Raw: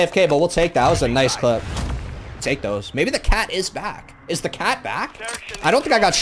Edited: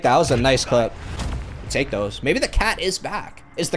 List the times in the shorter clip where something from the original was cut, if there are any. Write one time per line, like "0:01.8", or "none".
none